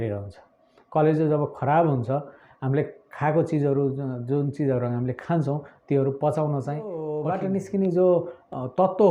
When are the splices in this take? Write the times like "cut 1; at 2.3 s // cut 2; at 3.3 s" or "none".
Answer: cut 1; at 7.1 s